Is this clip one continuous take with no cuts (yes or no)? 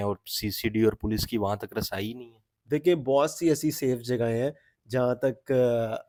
yes